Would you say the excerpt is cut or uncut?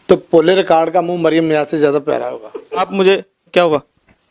cut